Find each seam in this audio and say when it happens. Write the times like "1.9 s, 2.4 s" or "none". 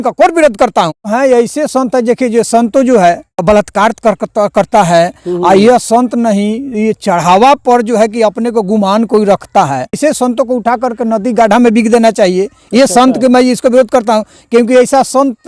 1.1 s, 3.4 s, 10.0 s